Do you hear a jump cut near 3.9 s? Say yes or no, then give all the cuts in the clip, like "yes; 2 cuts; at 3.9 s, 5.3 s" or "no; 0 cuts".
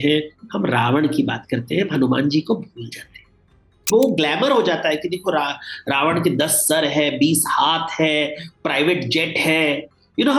yes; 1 cut; at 3.9 s